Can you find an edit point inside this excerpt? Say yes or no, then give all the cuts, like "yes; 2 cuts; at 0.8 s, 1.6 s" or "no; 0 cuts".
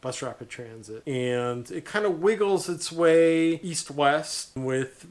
no; 0 cuts